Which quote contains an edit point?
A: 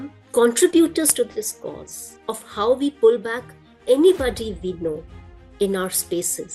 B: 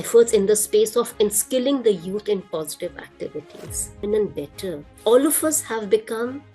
B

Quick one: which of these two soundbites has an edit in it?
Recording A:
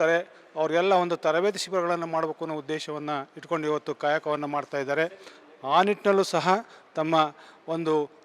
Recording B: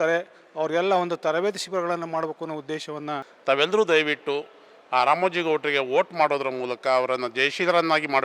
B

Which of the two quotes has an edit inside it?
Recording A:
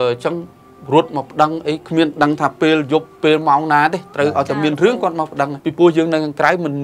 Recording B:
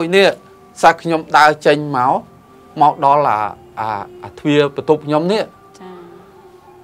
A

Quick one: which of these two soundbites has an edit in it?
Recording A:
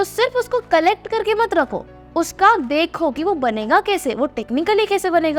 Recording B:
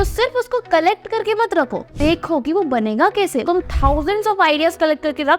B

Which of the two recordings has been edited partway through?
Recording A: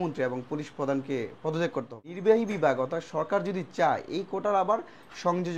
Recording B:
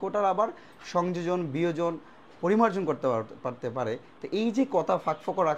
A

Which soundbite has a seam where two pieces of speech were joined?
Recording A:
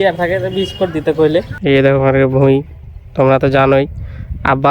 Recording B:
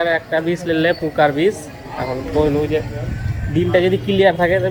A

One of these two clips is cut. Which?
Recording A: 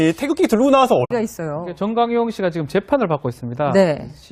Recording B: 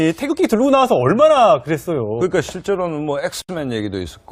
B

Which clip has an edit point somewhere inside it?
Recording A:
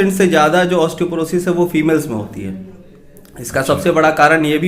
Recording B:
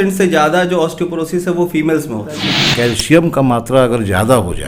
B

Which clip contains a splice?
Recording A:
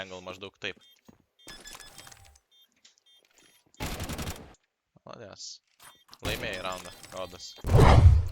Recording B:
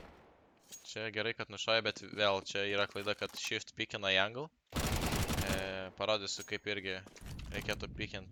A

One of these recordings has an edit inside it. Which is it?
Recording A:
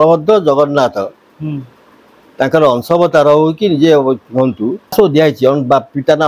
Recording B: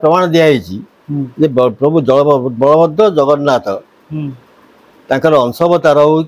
A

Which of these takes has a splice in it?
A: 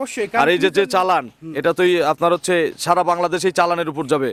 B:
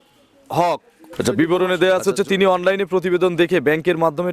B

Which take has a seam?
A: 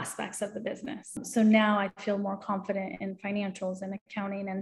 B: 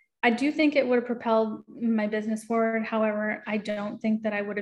A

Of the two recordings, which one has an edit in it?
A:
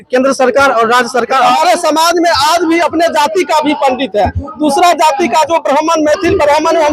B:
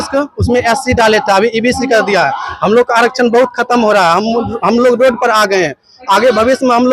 A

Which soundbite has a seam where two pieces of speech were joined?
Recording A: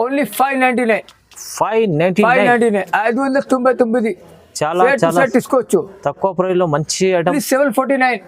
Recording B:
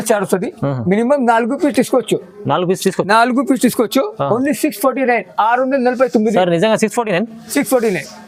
A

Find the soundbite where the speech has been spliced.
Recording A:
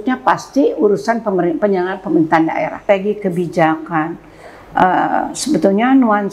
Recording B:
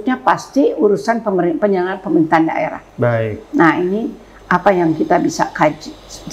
A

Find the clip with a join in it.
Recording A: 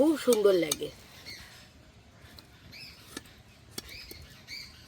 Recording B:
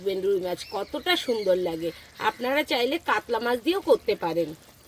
A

